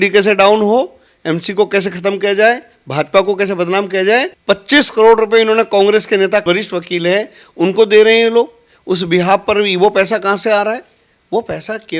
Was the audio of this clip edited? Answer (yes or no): yes